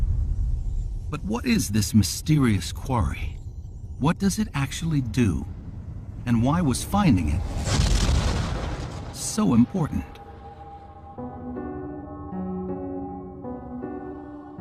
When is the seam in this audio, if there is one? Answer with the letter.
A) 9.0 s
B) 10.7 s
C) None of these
C